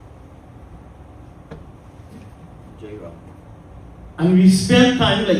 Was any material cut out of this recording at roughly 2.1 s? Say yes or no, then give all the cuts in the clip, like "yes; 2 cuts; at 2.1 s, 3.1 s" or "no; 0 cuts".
no; 1 cut; at 3.4 s